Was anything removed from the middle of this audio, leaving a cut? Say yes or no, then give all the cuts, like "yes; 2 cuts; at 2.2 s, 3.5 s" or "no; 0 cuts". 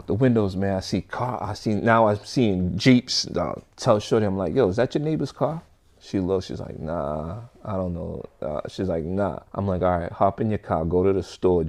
no; 0 cuts